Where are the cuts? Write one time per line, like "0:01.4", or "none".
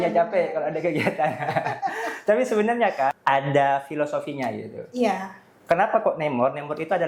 0:03.2